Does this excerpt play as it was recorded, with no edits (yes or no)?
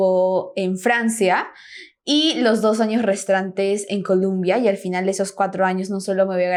yes